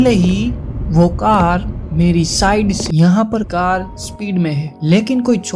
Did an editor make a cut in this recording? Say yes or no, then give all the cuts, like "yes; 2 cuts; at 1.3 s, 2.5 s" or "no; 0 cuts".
yes; 2 cuts; at 2.8 s, 3.5 s